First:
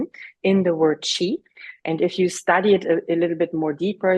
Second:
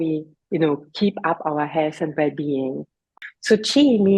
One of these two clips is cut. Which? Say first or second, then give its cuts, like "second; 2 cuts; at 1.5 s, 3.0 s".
second; 1 cut; at 3.1 s